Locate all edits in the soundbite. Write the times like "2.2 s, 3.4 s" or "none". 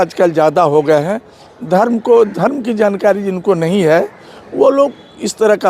none